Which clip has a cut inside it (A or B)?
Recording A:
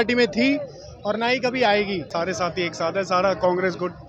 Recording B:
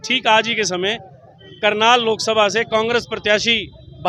A